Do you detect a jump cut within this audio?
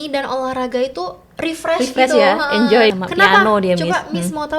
yes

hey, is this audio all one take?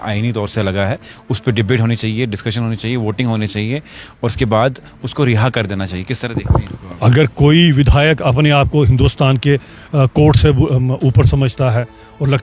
yes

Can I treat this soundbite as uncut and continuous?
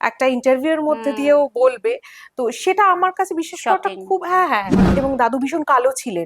no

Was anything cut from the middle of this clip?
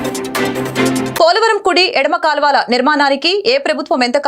yes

